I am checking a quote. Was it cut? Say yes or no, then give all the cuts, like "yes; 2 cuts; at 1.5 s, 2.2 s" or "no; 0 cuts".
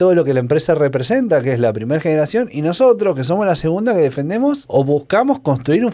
yes; 1 cut; at 4.6 s